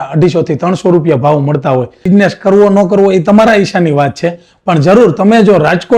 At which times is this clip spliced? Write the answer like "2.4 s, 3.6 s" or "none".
2.1 s